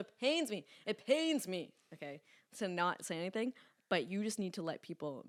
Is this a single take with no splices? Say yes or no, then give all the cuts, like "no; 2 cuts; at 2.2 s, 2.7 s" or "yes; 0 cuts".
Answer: yes; 0 cuts